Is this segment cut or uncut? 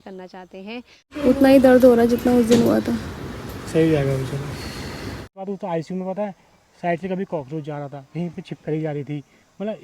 cut